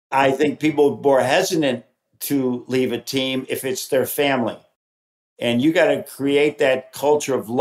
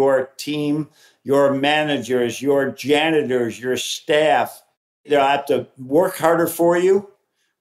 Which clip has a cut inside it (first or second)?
second